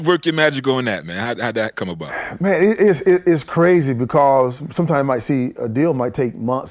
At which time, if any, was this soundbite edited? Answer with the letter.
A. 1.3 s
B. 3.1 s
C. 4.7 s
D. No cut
C